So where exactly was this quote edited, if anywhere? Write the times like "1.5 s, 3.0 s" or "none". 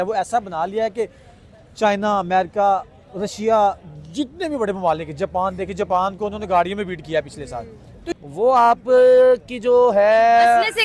8.0 s